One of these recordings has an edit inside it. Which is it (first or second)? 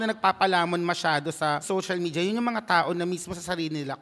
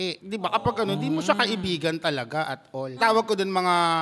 first